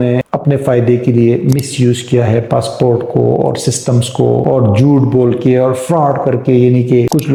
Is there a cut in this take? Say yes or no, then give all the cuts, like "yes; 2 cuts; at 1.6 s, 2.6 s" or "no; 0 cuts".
no; 0 cuts